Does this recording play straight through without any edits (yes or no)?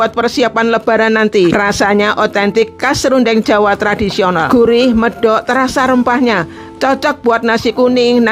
no